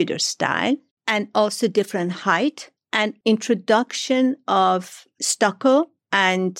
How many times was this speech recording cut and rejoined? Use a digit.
1